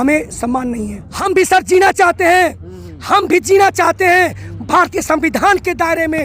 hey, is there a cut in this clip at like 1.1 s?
yes; 1 cut; at 1.1 s

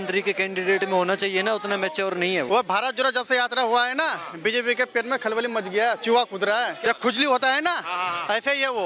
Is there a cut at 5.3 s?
no; 2 cuts; at 2.5 s, 6.8 s

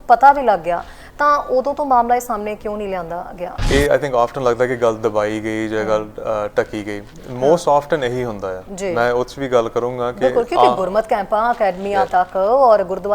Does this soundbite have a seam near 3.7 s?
yes; 1 cut; at 3.7 s

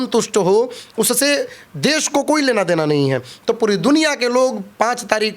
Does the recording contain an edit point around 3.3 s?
yes; 1 cut; at 3.3 s

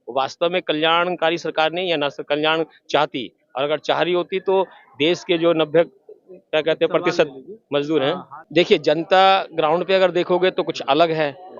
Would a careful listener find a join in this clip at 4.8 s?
no; 1 cut; at 8.3 s

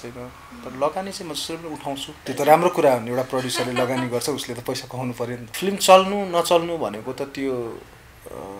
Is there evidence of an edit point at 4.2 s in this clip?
no; 2 cuts; at 2.2 s, 5.5 s

